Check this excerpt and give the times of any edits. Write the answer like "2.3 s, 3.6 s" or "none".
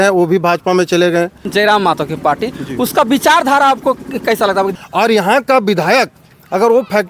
1.5 s, 4.7 s